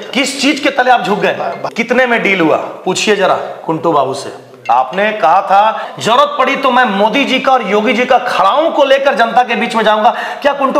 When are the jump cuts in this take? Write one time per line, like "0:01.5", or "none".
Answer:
0:01.6
0:04.6
0:05.9